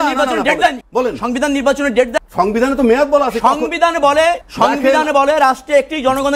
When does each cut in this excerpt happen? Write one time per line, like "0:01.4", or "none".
0:00.8
0:02.2
0:04.5